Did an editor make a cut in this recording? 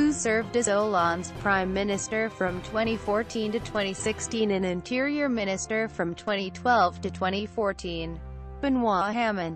yes; 1 cut; at 6.3 s

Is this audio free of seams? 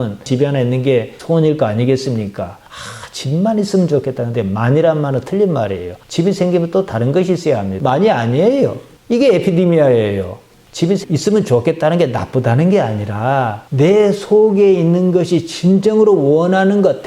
no; 1 cut; at 7.7 s

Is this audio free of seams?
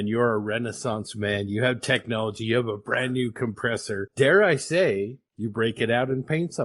yes; 0 cuts

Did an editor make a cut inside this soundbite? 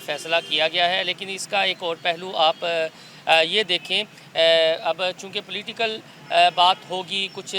no; 0 cuts

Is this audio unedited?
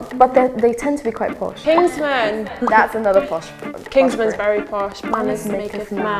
no; 2 cuts; at 1.6 s, 5.0 s

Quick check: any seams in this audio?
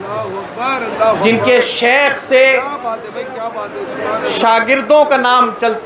no; 0 cuts

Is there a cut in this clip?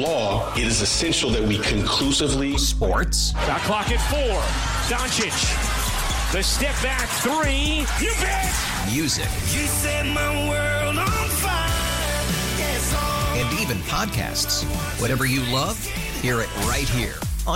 no; 0 cuts

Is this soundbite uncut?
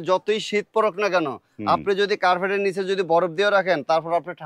yes; 0 cuts

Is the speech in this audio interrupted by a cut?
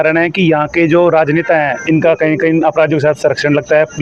no; 0 cuts

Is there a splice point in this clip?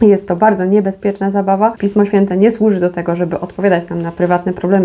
yes; 1 cut; at 1.8 s

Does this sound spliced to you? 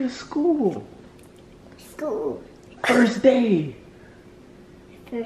no; 0 cuts

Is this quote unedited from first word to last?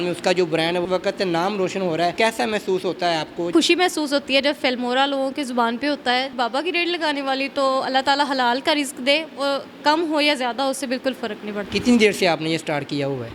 no; 5 cuts; at 0.8 s, 2.1 s, 3.5 s, 6.3 s, 11.7 s

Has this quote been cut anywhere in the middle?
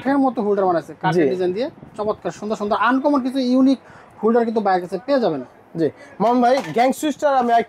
no; 0 cuts

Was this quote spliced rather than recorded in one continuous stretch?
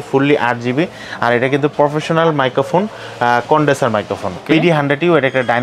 yes; 1 cut; at 4.4 s

